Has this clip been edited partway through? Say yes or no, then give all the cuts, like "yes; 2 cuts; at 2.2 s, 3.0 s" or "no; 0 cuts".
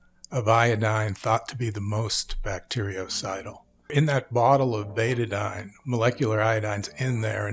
no; 0 cuts